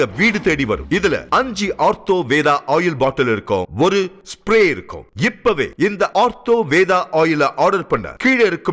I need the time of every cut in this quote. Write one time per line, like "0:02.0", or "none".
none